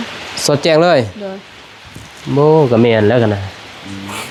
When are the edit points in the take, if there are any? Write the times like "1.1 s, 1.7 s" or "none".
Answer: none